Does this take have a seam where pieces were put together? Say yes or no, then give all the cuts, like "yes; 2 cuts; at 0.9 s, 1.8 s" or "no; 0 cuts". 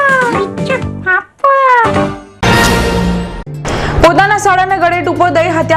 yes; 1 cut; at 2.3 s